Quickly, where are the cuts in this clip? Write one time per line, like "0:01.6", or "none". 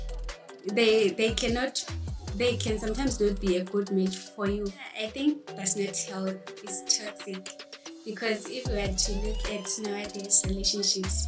0:04.9